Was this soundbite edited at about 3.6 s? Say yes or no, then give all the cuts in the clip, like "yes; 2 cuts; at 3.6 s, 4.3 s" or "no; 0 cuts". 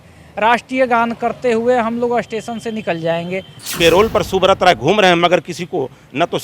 yes; 1 cut; at 3.6 s